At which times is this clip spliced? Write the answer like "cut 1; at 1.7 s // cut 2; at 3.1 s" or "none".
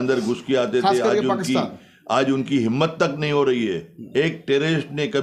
none